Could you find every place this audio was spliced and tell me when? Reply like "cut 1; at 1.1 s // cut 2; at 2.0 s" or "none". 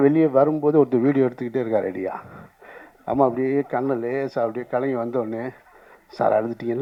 none